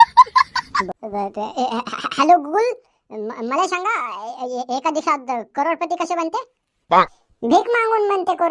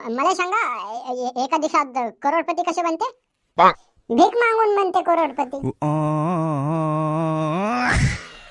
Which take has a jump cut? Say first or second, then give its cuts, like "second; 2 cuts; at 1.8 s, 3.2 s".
first; 1 cut; at 0.9 s